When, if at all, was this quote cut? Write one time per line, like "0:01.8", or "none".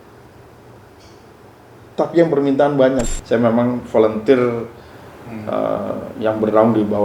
0:03.0